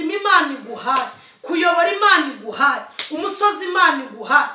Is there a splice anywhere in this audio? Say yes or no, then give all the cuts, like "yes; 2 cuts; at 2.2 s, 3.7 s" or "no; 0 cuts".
no; 0 cuts